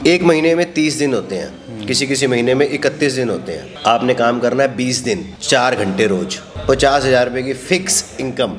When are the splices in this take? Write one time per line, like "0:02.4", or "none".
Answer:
none